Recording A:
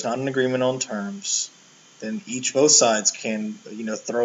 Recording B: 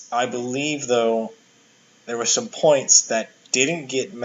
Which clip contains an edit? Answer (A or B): A